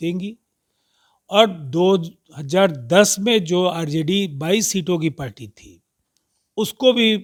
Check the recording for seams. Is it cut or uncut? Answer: uncut